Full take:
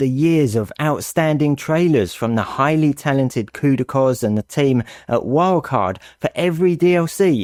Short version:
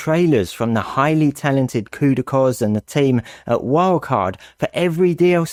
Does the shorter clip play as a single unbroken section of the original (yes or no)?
yes